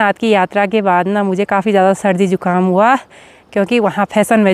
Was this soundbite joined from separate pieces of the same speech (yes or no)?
no